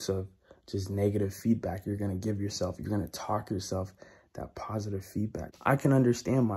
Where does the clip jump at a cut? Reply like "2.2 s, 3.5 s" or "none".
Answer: 5.4 s

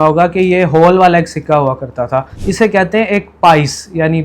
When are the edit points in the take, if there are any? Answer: 2.4 s

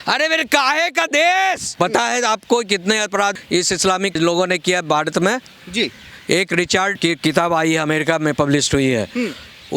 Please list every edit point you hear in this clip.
none

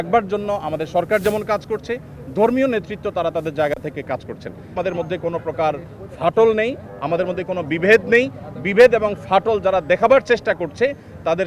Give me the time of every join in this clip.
4.7 s

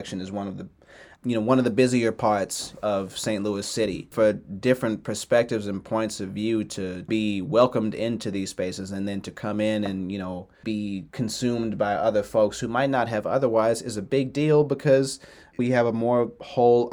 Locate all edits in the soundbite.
4.1 s, 7.1 s, 10.6 s, 15.5 s

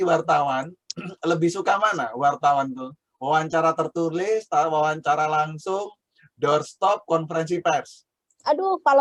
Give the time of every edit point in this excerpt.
none

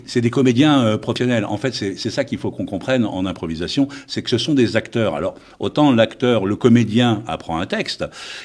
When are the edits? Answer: 1.2 s

